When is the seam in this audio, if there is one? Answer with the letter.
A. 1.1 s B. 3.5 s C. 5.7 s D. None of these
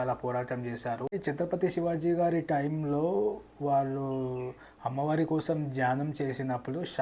A